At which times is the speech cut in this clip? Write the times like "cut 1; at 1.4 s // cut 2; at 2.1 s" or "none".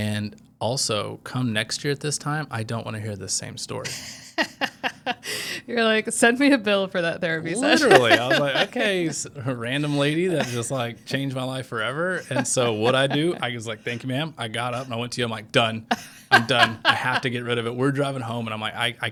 none